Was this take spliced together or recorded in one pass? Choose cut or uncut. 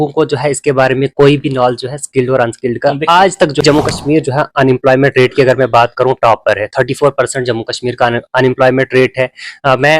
cut